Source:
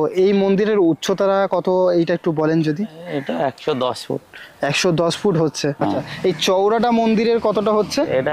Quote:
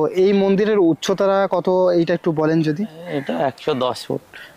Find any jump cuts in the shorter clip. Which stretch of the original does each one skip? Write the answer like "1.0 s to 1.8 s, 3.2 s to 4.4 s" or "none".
none